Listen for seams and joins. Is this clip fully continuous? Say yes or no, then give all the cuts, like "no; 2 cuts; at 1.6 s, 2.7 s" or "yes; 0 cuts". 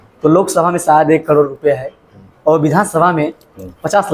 yes; 0 cuts